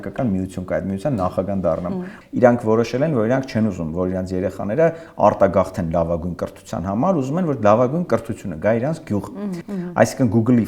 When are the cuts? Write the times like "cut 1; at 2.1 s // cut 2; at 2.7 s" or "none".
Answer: cut 1; at 2.1 s // cut 2; at 9.6 s